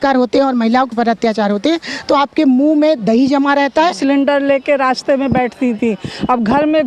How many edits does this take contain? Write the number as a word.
one